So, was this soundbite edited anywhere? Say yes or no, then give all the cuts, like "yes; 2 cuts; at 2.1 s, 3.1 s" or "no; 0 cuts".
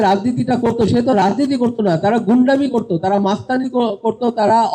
no; 0 cuts